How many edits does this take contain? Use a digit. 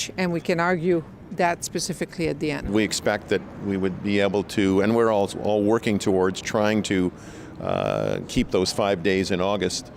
1